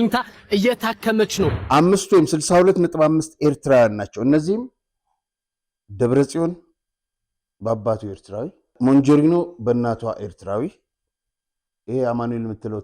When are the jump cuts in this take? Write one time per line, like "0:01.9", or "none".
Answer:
0:01.6
0:08.7